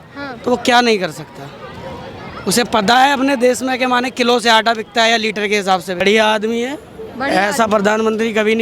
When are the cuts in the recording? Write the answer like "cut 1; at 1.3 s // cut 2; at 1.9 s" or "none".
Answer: cut 1; at 6.0 s